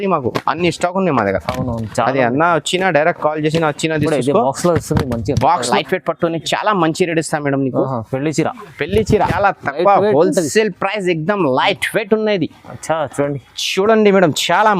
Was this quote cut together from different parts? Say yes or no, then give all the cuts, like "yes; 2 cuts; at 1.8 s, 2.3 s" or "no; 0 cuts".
yes; 2 cuts; at 5.7 s, 9.3 s